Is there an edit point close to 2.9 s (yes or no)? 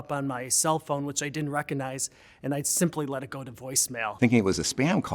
no